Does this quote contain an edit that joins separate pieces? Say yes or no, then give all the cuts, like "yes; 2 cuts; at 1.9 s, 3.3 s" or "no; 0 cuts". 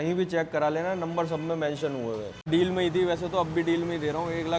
yes; 1 cut; at 2.5 s